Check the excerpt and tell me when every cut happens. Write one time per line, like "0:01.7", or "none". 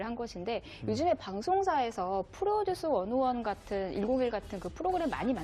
0:02.3